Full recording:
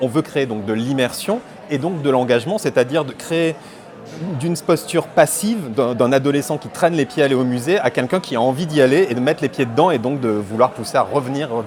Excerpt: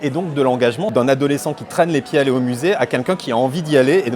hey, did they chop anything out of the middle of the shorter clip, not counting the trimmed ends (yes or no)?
yes